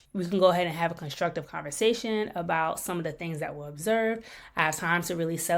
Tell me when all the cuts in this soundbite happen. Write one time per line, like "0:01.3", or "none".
none